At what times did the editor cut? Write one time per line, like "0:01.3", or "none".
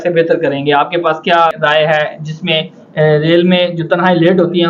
0:01.5